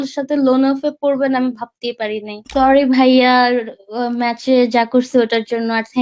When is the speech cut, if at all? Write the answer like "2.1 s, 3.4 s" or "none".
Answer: 2.3 s